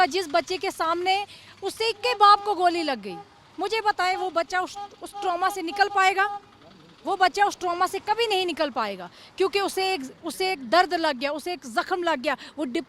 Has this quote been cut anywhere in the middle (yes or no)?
no